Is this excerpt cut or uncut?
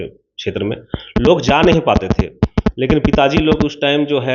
uncut